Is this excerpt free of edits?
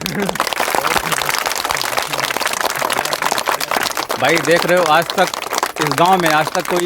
no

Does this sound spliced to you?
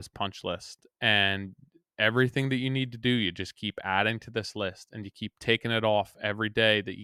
no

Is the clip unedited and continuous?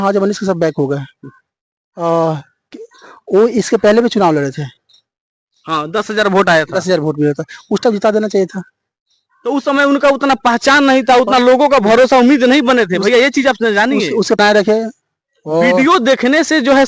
no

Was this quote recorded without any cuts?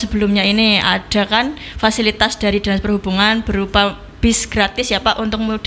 yes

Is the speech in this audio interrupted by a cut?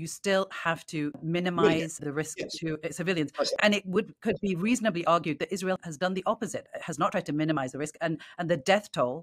no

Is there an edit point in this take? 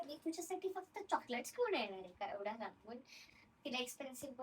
yes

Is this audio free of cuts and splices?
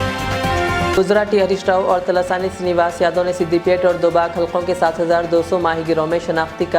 no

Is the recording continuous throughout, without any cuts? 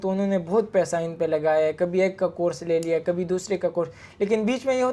yes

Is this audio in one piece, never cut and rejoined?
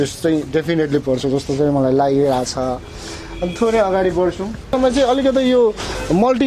no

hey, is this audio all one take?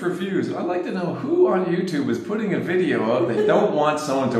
yes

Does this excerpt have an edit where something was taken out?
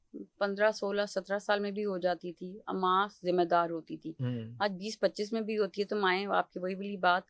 no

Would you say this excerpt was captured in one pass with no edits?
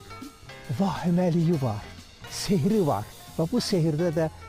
yes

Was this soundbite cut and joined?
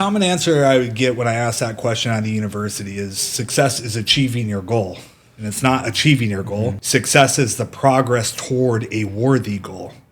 yes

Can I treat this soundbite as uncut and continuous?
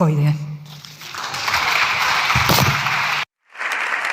yes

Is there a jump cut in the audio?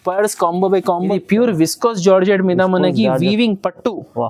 yes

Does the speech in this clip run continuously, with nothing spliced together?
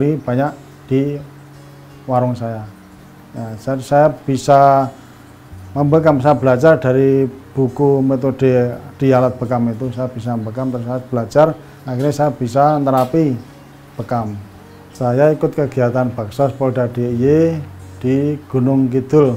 no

